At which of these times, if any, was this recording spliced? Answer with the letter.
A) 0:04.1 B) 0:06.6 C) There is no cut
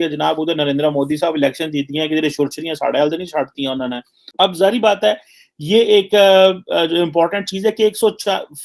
C